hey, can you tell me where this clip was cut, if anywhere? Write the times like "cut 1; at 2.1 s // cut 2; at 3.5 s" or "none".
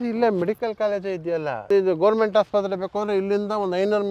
cut 1; at 1.7 s